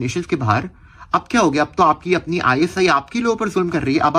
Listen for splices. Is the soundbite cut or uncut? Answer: uncut